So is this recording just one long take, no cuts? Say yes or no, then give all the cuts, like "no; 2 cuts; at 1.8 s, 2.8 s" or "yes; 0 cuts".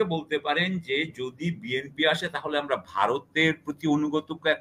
yes; 0 cuts